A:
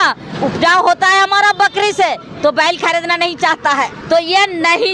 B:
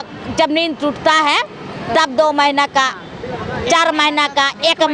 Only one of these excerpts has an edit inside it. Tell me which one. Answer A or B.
A